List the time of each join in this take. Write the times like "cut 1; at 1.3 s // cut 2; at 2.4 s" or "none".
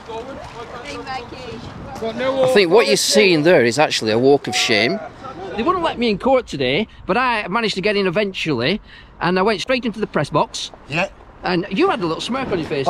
none

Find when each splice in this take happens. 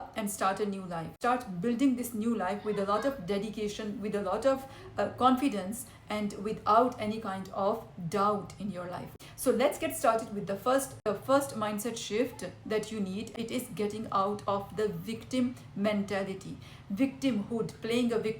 cut 1; at 1.1 s // cut 2; at 9.1 s // cut 3; at 11.0 s // cut 4; at 13.3 s

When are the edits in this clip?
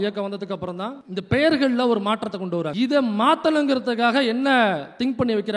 cut 1; at 2.7 s

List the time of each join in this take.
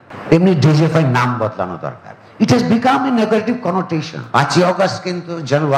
cut 1; at 4.2 s

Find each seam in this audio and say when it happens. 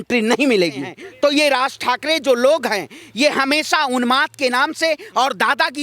cut 1; at 1.0 s

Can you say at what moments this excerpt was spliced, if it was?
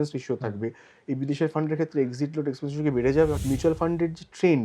cut 1; at 3.4 s

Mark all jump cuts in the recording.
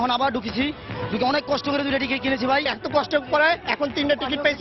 cut 1; at 2.7 s

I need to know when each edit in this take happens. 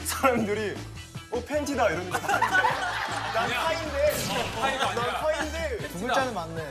none

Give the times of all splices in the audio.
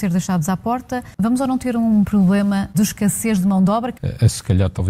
cut 1; at 1.1 s

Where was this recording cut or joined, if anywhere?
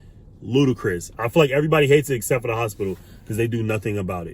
cut 1; at 1.1 s

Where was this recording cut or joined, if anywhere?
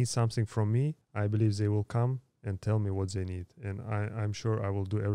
cut 1; at 1.0 s

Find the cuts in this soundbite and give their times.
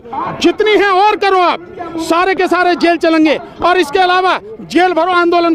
none

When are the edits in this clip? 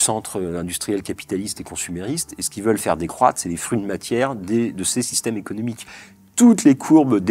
cut 1; at 5.8 s

